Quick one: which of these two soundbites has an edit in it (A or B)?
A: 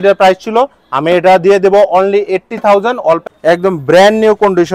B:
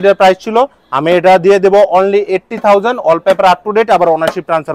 A